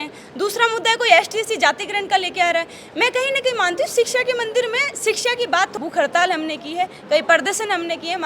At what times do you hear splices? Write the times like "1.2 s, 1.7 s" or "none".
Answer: 5.7 s